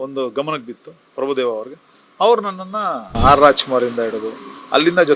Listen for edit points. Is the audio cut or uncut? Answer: cut